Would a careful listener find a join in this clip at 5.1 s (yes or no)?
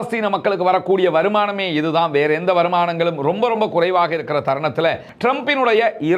yes